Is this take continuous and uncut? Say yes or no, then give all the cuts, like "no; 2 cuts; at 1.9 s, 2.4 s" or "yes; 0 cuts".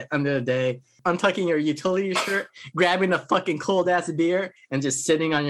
no; 1 cut; at 0.9 s